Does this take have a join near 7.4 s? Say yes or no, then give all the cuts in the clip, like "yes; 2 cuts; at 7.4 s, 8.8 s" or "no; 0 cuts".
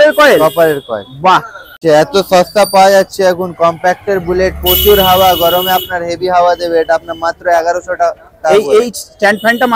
no; 1 cut; at 1.8 s